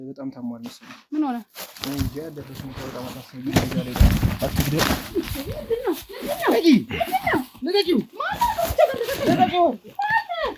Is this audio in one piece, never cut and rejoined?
yes; 0 cuts

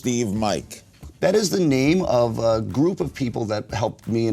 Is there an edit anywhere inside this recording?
no; 0 cuts

